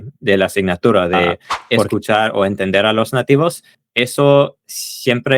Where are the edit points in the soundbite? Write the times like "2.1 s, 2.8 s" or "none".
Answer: 1.9 s

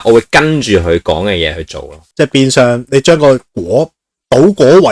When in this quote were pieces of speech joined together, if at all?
none

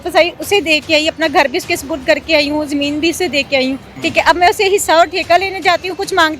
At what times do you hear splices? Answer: 3.9 s

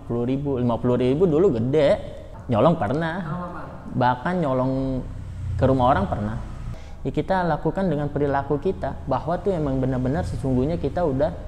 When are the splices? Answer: 2.3 s, 6.6 s

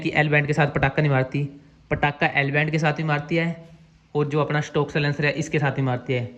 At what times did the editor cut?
none

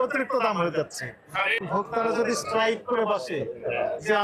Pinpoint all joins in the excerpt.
1.6 s

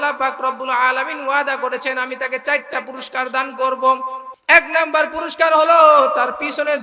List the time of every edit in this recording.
4.3 s

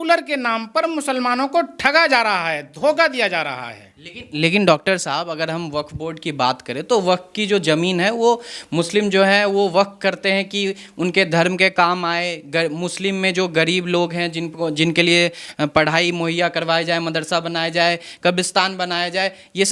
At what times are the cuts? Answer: none

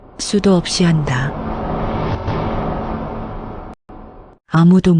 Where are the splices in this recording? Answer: 1.2 s, 3.8 s

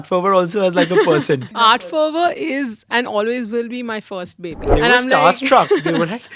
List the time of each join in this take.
1.6 s, 4.7 s

